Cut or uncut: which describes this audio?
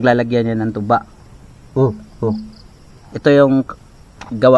uncut